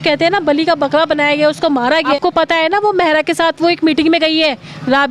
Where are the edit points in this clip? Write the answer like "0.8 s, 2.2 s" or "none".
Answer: 2.2 s